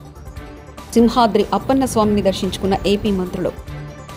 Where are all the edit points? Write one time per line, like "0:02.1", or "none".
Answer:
0:00.9